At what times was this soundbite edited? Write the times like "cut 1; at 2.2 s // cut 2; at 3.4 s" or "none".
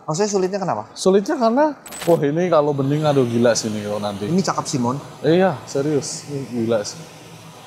cut 1; at 1.9 s